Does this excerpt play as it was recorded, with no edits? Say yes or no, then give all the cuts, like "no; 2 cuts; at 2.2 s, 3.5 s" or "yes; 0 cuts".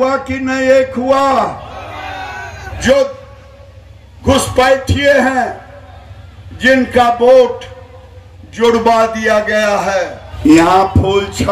no; 2 cuts; at 2.8 s, 10.2 s